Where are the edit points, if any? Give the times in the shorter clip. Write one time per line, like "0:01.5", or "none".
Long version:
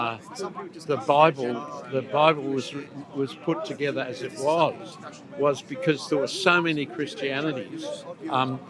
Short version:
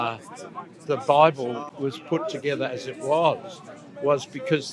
0:01.7